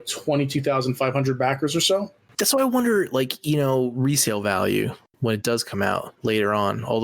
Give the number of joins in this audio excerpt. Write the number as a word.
one